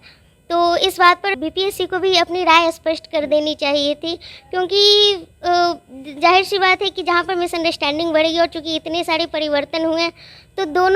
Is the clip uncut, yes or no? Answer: no